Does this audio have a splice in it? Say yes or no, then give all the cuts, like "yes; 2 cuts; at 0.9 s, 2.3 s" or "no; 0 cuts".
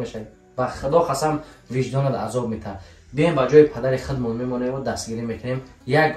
no; 0 cuts